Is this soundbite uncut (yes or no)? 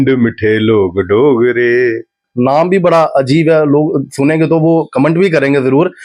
no